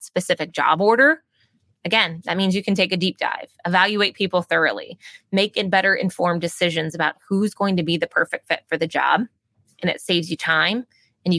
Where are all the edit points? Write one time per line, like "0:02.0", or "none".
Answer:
none